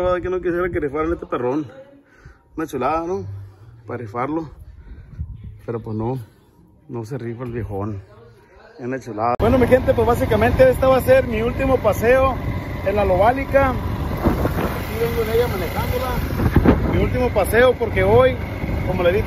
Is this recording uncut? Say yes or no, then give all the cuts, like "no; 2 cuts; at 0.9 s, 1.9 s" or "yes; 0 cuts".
no; 1 cut; at 9.3 s